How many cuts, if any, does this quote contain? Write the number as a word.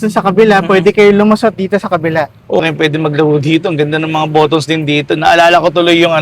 one